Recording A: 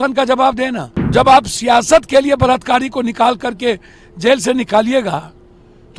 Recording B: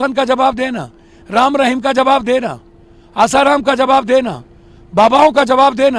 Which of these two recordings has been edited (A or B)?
A